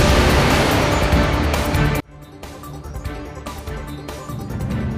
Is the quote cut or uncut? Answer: uncut